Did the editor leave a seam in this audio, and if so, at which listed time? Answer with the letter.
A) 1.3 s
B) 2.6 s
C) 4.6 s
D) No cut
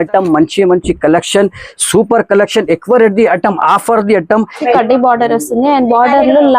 C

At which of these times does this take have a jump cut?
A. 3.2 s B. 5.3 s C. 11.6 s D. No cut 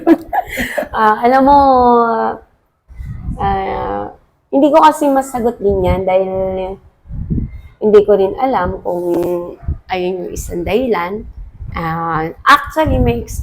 C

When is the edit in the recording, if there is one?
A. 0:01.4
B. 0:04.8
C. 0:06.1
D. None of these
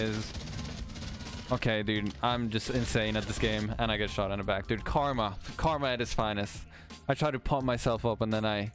D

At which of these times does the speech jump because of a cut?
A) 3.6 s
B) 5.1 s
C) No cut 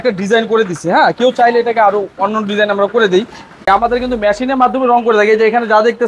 A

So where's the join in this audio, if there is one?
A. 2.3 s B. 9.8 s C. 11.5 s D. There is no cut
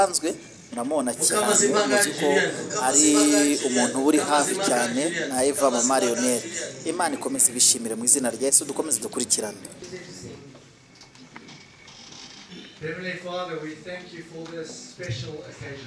B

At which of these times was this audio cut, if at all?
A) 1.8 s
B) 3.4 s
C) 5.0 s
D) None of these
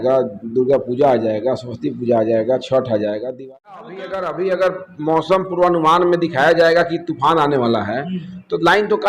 B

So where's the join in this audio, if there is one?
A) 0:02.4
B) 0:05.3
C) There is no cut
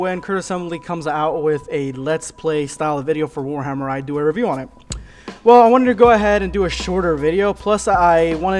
B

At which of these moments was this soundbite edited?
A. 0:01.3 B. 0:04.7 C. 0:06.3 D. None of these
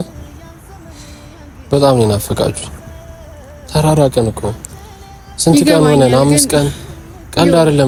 D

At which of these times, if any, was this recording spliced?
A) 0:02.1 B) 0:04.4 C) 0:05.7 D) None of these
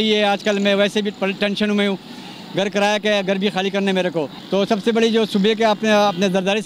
B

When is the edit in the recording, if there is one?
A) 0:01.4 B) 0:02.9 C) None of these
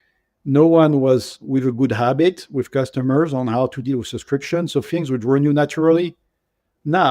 A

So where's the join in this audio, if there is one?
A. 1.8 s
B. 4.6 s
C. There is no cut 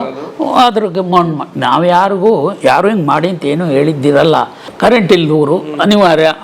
B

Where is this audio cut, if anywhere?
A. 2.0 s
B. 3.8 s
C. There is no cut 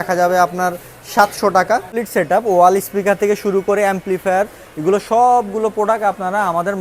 A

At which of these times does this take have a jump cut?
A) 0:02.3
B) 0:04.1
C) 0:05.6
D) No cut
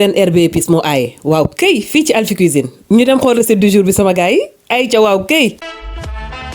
C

